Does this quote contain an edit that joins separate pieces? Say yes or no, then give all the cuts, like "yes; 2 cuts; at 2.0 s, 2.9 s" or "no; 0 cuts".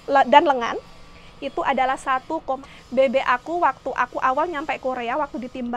yes; 1 cut; at 2.7 s